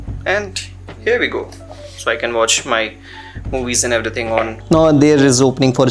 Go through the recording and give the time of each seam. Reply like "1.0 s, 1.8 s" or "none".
4.6 s